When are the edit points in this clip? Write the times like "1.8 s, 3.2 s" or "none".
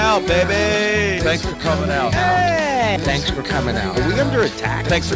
none